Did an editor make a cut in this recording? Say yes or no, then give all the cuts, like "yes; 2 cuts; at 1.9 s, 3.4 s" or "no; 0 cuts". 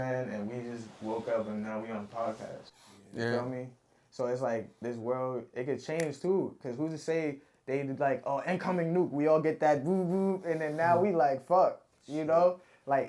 no; 0 cuts